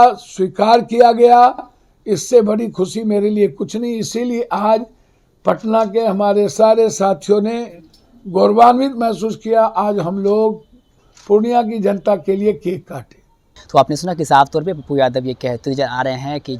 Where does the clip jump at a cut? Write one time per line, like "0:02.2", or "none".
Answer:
none